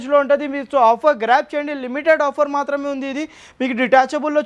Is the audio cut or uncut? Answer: uncut